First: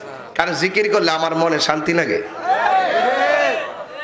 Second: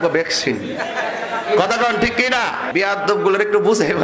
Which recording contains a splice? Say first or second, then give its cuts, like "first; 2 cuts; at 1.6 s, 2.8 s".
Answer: second; 1 cut; at 2.7 s